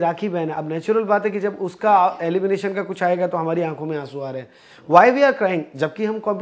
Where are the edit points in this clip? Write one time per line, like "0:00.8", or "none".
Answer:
none